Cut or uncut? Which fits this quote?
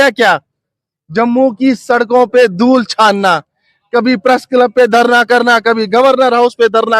uncut